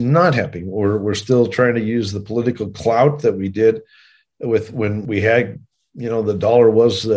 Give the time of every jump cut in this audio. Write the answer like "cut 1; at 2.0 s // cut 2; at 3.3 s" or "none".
cut 1; at 5.0 s